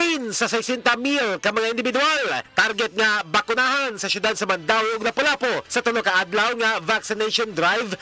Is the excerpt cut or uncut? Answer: uncut